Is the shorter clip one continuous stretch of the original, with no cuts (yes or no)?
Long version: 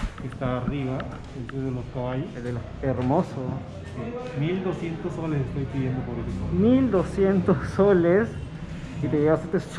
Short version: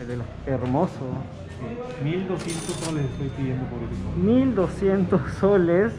yes